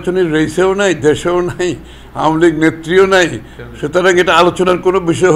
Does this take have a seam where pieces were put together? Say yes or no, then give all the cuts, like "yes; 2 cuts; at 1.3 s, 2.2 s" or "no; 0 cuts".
no; 0 cuts